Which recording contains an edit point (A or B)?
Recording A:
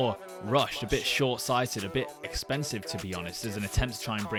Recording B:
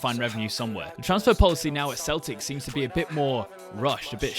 B